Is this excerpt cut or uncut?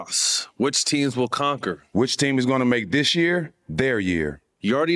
cut